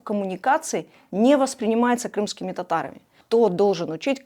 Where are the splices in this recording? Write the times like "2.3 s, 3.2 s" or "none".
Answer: 3.2 s